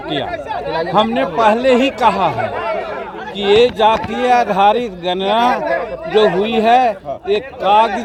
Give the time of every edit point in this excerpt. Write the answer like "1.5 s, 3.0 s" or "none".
none